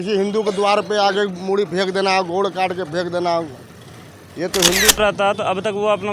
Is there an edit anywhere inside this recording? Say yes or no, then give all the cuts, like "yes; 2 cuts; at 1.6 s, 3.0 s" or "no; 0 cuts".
yes; 1 cut; at 5.0 s